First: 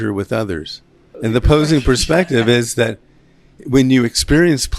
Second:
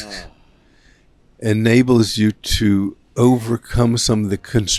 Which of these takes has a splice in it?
first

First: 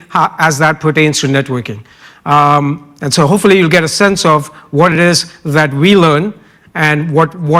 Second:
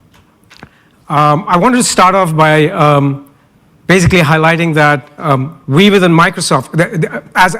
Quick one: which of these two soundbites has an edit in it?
second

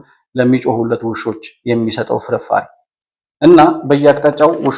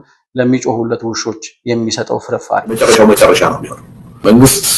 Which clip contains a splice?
second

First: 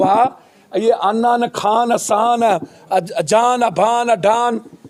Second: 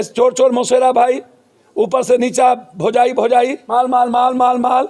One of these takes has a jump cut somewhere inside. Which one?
second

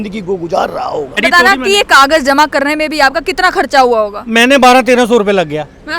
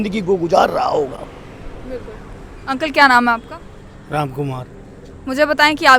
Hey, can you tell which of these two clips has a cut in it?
first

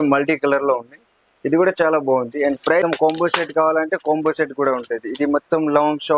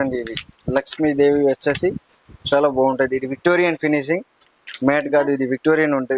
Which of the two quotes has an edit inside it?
first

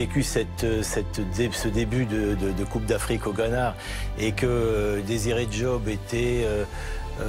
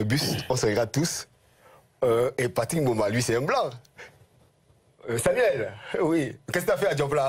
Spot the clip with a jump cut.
second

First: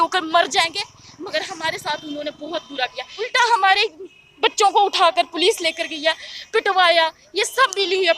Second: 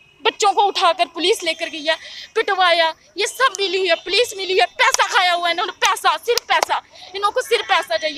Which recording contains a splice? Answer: first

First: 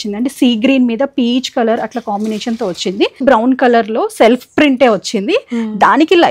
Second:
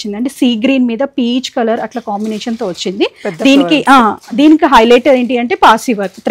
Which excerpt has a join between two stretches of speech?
first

